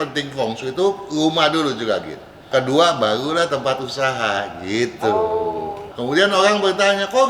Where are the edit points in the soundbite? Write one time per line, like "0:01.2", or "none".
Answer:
0:02.5
0:05.8

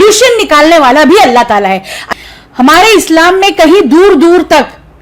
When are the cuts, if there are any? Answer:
0:01.9

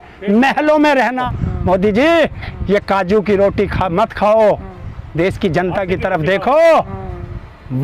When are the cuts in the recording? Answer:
0:01.4

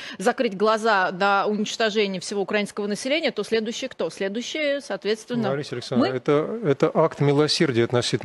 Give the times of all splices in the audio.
none

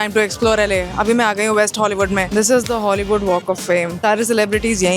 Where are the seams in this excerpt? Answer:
0:02.2
0:03.9

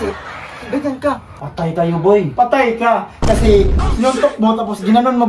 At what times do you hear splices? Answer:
0:01.3

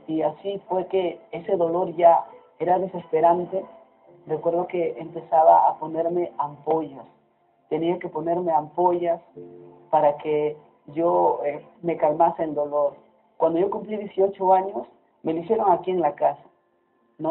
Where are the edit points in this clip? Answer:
none

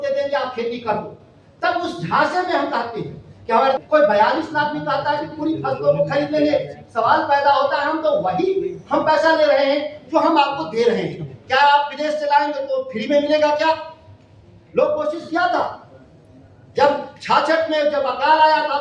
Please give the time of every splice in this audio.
0:03.8

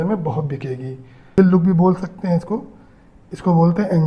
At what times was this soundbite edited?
0:01.4

